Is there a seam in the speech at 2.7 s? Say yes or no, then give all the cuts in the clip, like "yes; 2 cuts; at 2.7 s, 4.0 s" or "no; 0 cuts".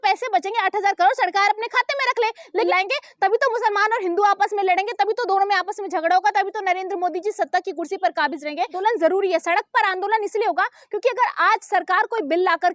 yes; 2 cuts; at 2.7 s, 8.8 s